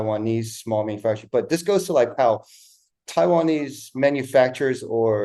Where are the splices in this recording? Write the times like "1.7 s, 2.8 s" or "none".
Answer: none